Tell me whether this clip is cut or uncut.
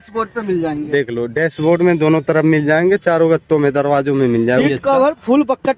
cut